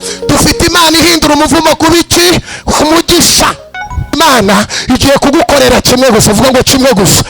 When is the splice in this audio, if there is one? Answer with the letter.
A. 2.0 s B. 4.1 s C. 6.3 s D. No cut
B